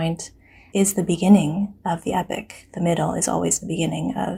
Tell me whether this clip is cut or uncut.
uncut